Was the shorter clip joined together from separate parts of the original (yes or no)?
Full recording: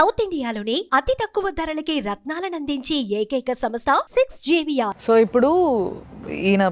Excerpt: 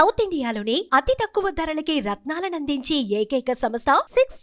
no